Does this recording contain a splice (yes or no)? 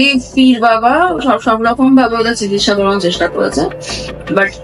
no